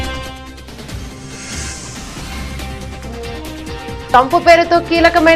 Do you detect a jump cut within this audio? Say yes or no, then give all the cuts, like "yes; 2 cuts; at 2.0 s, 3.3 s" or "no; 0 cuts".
no; 0 cuts